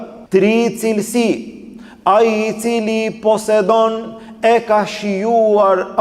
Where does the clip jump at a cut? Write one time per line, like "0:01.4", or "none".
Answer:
none